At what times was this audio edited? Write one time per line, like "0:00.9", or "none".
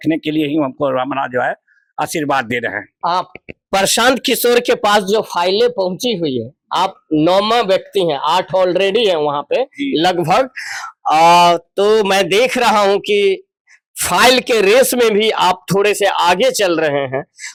none